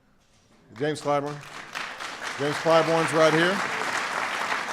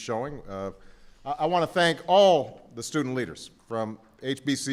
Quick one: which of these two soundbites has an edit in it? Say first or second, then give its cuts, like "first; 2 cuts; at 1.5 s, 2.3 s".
first; 1 cut; at 1.2 s